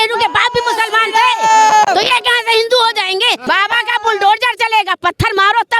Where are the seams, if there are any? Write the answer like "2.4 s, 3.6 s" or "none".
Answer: 3.4 s